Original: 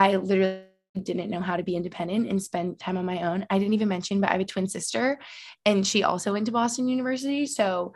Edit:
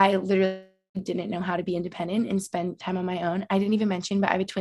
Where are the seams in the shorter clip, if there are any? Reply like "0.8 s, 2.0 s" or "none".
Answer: none